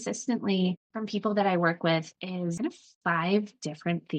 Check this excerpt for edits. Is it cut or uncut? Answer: cut